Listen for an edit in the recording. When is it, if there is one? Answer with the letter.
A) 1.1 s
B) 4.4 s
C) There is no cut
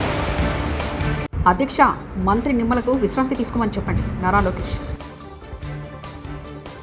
A